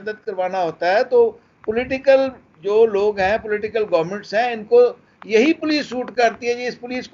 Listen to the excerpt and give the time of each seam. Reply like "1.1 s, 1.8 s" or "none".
none

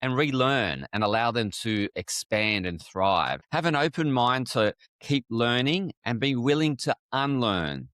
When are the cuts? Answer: 3.4 s, 4.9 s

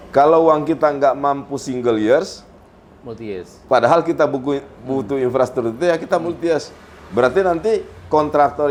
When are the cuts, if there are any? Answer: none

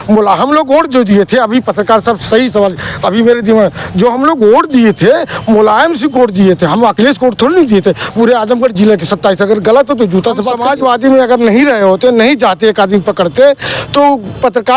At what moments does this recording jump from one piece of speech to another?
10.5 s

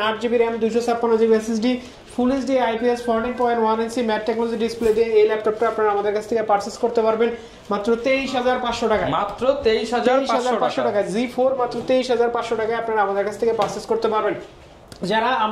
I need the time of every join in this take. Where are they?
none

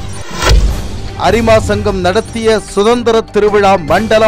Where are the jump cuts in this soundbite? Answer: 1.2 s

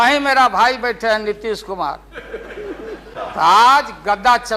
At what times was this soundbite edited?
3.1 s

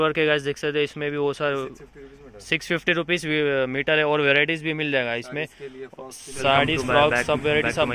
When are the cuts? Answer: none

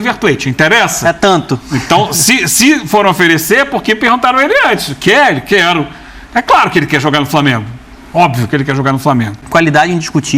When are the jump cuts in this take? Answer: 9.4 s

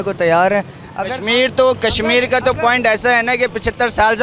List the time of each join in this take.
none

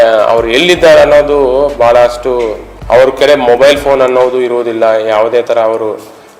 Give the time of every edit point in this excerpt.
2.6 s

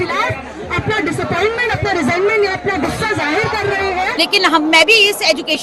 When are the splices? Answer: 4.1 s

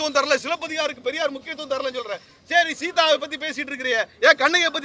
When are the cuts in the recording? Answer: none

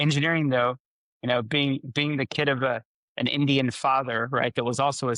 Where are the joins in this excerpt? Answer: none

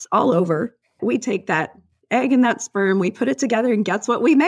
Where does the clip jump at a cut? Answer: 1.0 s

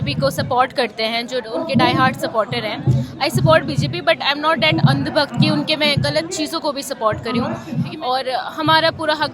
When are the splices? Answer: 7.9 s

